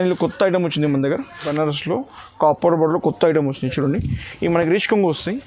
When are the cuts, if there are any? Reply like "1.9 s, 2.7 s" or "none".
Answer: 1.5 s